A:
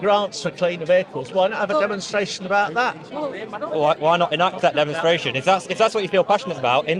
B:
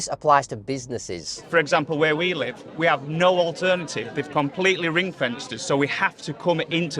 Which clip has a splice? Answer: B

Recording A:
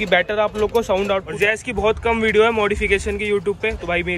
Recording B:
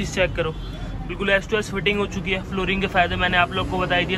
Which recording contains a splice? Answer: A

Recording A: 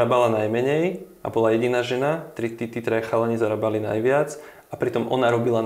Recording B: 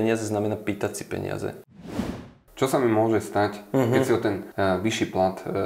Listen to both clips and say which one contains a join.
B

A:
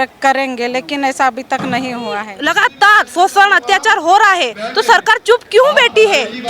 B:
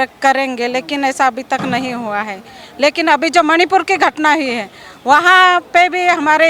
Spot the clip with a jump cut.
A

